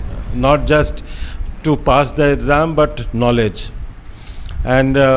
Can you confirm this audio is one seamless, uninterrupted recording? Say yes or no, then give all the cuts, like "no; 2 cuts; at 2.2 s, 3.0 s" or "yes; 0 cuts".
yes; 0 cuts